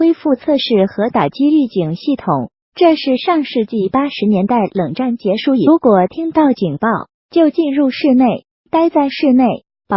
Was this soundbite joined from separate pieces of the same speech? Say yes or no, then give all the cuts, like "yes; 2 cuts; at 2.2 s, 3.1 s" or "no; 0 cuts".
no; 0 cuts